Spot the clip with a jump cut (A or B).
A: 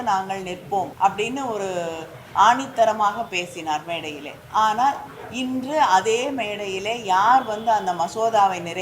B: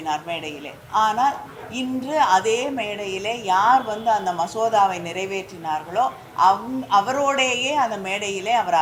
A